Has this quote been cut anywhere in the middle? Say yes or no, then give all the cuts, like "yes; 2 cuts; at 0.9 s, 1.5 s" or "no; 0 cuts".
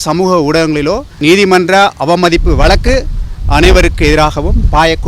yes; 1 cut; at 1.1 s